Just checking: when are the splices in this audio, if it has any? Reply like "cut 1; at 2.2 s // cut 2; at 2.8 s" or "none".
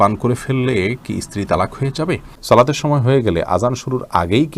cut 1; at 2.3 s

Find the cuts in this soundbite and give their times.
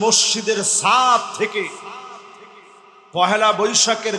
none

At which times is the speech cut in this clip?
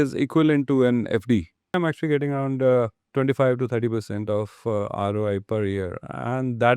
cut 1; at 1.7 s // cut 2; at 3.0 s

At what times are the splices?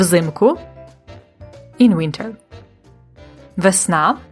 none

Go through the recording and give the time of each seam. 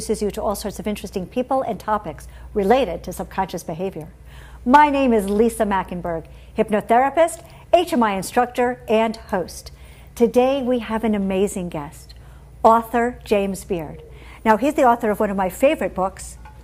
none

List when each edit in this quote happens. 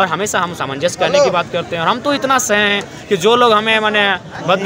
none

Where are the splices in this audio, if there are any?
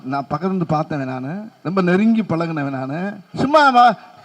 cut 1; at 3.2 s

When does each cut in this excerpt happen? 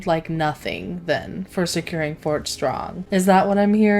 cut 1; at 3.0 s

